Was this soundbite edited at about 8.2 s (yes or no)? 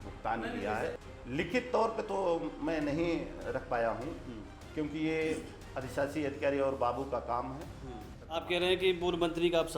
yes